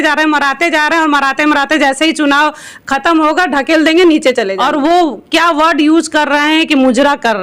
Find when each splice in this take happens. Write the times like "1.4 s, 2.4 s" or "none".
4.6 s